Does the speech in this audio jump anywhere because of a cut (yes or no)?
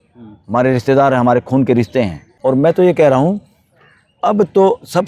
yes